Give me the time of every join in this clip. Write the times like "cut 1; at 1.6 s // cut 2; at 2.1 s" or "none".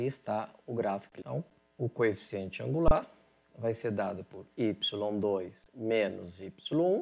cut 1; at 1.1 s